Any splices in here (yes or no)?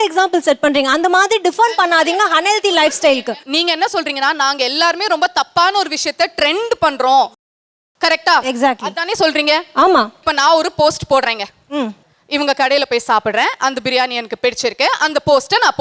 no